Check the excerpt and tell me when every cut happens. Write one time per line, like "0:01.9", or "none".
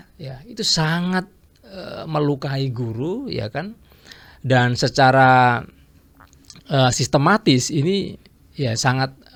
none